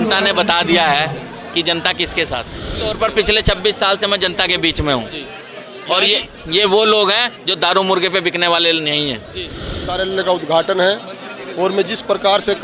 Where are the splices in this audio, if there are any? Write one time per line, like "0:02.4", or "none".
0:02.8
0:09.9